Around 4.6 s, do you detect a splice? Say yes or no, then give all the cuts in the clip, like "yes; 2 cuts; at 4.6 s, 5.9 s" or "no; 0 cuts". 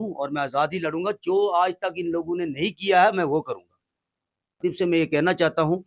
yes; 1 cut; at 4.6 s